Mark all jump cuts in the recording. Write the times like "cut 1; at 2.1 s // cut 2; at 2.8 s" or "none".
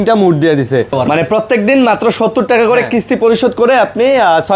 cut 1; at 1.0 s